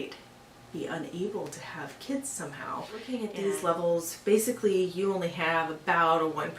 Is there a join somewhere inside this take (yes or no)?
yes